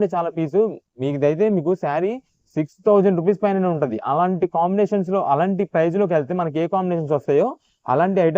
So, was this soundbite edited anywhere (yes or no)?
no